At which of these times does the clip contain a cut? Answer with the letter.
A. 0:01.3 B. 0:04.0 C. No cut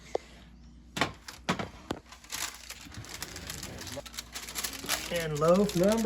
B